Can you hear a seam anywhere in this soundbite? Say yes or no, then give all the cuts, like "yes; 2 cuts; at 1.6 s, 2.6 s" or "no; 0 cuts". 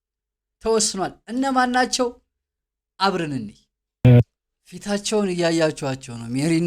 yes; 1 cut; at 4.0 s